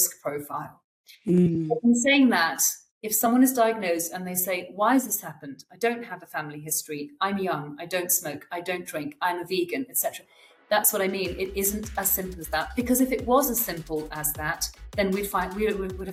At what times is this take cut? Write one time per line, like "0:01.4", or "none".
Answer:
none